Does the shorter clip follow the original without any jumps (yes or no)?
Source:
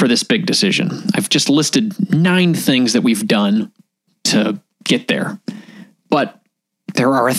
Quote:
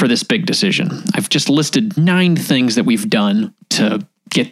no